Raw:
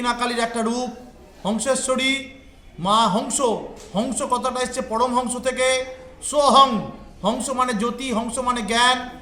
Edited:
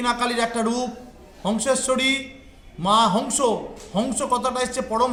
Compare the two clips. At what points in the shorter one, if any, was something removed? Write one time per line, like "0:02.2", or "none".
none